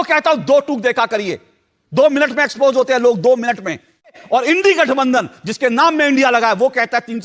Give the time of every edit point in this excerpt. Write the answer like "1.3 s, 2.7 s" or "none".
4.2 s